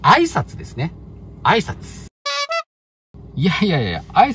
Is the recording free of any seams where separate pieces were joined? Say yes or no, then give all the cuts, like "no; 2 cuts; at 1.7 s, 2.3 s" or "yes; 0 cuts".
no; 1 cut; at 1.1 s